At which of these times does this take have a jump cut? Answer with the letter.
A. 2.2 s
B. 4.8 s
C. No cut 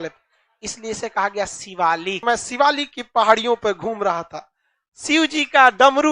A